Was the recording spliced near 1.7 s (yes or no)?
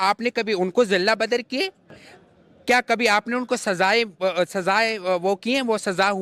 no